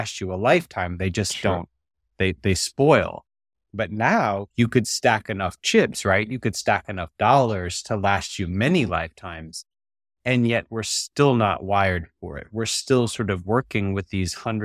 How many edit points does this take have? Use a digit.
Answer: 0